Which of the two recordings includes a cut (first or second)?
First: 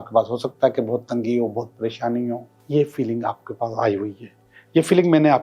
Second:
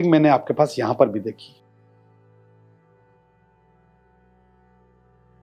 first